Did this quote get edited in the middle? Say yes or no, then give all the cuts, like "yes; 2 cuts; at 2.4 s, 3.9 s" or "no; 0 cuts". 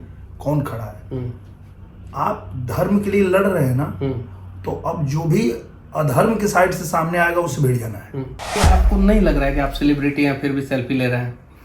yes; 1 cut; at 8.6 s